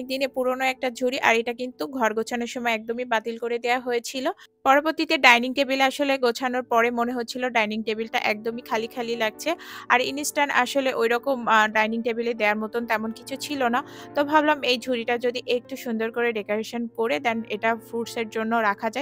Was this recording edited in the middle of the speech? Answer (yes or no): no